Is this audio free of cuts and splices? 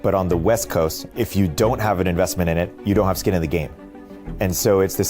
no; 3 cuts; at 1.0 s, 2.8 s, 4.0 s

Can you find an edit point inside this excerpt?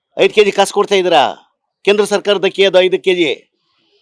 no; 0 cuts

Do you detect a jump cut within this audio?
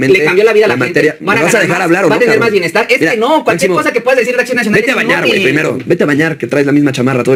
no; 0 cuts

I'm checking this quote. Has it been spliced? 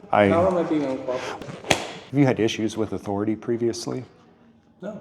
yes; 1 cut; at 1.4 s

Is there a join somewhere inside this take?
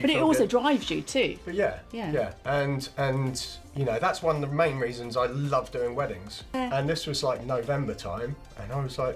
yes; 1 cut; at 6.5 s

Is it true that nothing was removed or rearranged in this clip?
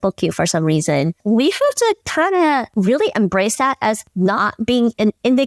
no; 3 cuts; at 1.2 s, 2.7 s, 4.1 s

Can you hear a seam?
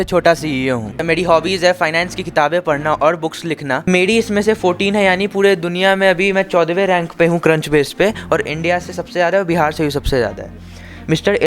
yes; 2 cuts; at 1.0 s, 3.8 s

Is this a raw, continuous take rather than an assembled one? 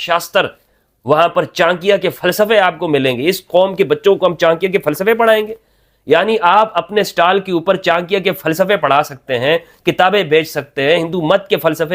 yes; 0 cuts

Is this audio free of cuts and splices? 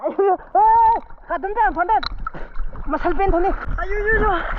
no; 1 cut; at 3.6 s

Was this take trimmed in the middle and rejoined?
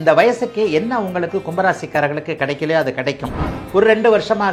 yes; 1 cut; at 3.5 s

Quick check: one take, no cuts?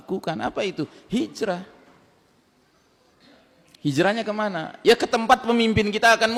yes; 0 cuts

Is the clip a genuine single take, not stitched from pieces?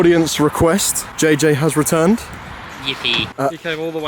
no; 2 cuts; at 1.0 s, 3.3 s

